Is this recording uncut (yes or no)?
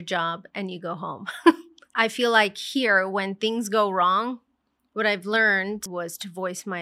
no